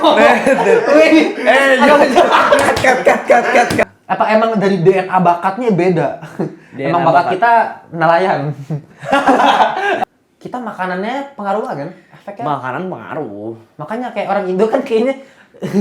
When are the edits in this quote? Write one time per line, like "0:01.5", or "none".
0:03.8
0:10.0